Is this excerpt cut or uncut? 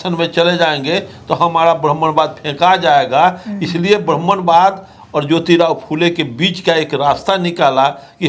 uncut